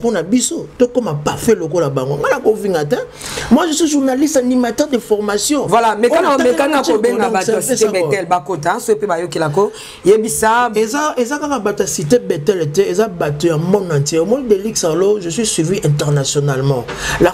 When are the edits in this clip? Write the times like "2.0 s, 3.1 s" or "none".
none